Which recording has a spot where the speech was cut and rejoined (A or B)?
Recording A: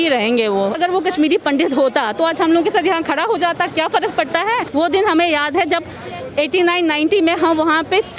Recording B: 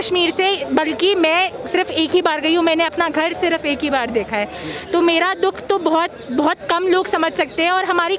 A